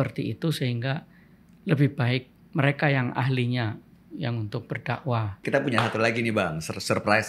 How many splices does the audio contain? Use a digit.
1